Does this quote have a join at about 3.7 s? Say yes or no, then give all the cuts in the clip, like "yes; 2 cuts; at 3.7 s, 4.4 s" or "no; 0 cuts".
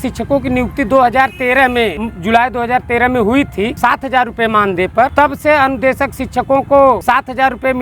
yes; 4 cuts; at 2.1 s, 3.7 s, 5.1 s, 7.0 s